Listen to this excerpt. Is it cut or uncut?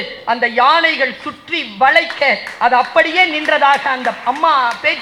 uncut